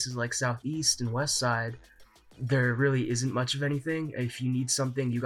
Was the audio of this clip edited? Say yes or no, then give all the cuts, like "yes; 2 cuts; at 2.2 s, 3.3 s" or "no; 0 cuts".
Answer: no; 0 cuts